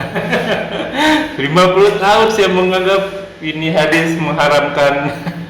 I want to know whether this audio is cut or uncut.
uncut